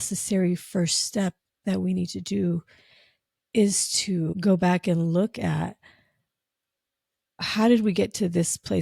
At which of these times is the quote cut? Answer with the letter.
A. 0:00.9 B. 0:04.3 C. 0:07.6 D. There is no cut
B